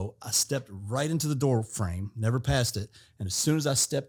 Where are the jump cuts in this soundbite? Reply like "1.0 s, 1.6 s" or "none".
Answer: none